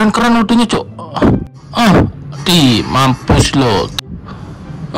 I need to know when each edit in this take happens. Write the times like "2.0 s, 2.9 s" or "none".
1.6 s, 4.0 s